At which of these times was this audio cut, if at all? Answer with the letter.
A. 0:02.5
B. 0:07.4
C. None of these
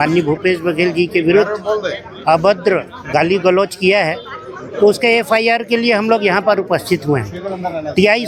C